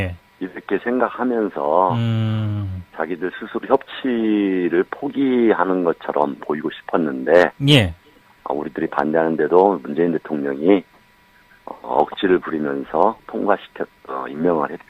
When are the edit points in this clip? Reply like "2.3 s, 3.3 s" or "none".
none